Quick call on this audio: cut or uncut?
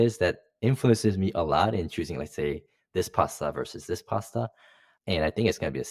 uncut